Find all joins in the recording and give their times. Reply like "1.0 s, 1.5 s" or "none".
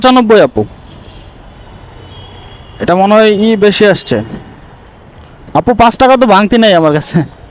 none